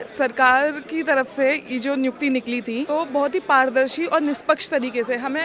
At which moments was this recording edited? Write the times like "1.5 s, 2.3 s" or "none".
2.9 s